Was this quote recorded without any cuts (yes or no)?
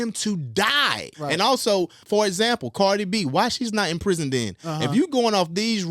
no